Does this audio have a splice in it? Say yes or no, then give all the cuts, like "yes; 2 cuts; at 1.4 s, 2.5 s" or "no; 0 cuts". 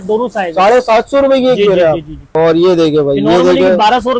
yes; 1 cut; at 2.3 s